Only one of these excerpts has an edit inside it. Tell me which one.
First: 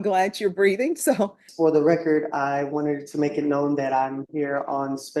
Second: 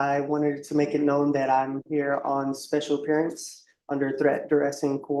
first; 1 cut; at 1.4 s

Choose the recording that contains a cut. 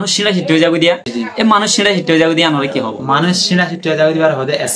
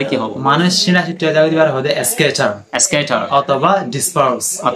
first; 1 cut; at 1.1 s

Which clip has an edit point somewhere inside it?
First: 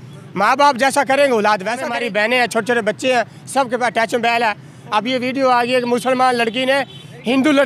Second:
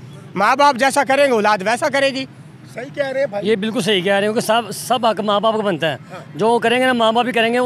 first; 1 cut; at 1.9 s

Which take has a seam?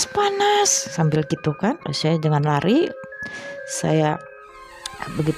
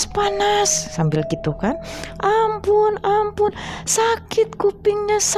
first; 1 cut; at 1.9 s

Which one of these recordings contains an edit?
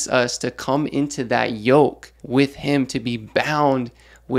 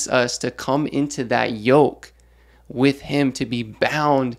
first; 1 cut; at 2.1 s

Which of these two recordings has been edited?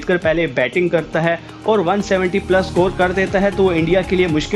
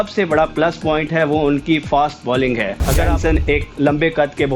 second; 1 cut; at 3.1 s

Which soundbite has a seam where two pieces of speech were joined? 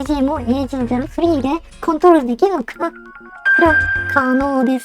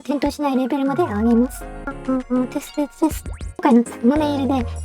second; 2 cuts; at 2.0 s, 3.4 s

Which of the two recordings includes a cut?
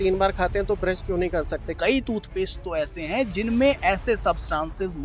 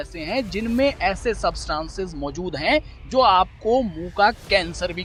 first; 1 cut; at 1.7 s

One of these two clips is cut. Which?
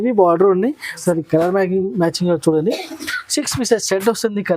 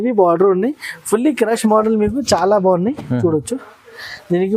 first; 1 cut; at 0.9 s

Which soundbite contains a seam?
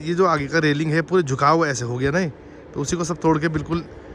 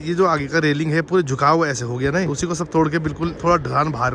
second; 2 cuts; at 2.3 s, 3.4 s

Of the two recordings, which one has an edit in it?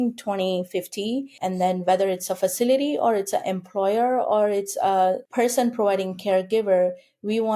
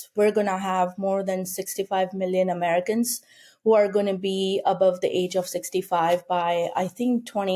first; 2 cuts; at 1.4 s, 5.2 s

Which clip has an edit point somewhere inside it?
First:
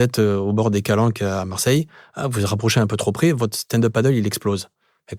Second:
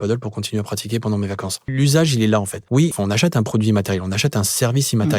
second; 2 cuts; at 1.7 s, 2.9 s

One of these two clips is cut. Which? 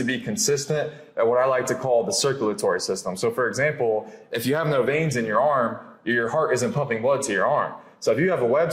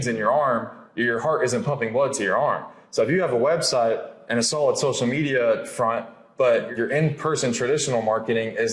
second; 1 cut; at 6.7 s

